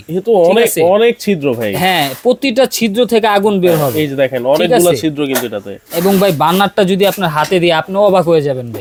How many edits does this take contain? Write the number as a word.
zero